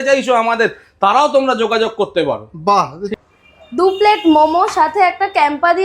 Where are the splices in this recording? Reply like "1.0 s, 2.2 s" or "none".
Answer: 3.0 s